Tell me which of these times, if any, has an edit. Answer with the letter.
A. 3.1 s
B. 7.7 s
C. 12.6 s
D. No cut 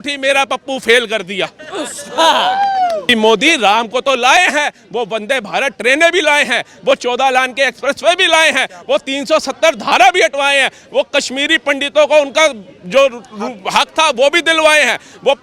A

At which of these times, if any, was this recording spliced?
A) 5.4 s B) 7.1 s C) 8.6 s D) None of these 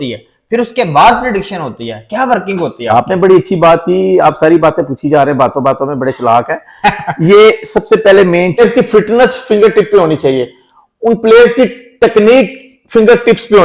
C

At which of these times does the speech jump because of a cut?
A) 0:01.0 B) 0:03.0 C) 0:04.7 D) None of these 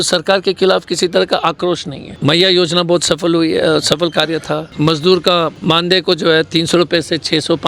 C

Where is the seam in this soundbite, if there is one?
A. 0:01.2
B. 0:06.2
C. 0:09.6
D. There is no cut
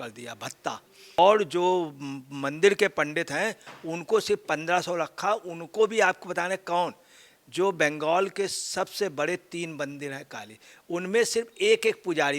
A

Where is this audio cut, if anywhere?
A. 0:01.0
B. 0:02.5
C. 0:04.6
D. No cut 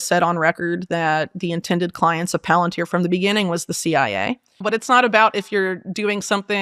C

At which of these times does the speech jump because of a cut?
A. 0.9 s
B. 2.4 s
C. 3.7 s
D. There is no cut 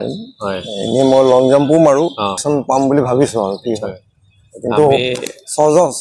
B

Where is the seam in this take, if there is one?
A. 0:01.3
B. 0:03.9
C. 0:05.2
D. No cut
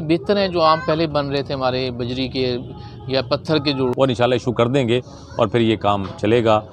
B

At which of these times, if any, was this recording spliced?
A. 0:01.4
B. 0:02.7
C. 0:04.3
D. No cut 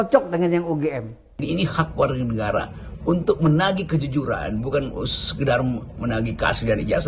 A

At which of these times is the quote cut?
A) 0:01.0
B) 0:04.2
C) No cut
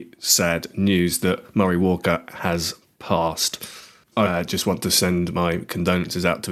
B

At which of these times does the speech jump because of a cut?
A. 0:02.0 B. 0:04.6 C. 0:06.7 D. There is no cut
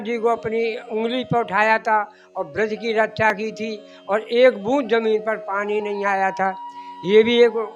D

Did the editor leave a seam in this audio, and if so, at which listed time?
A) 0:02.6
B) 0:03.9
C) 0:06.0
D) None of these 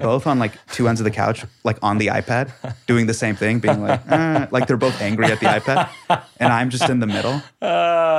D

